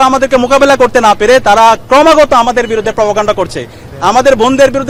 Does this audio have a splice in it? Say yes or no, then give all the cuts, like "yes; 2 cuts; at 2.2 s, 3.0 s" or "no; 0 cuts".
no; 0 cuts